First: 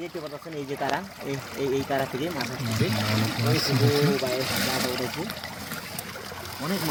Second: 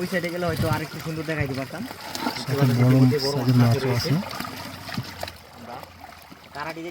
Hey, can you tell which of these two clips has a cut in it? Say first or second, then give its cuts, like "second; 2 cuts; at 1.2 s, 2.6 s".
second; 1 cut; at 2.3 s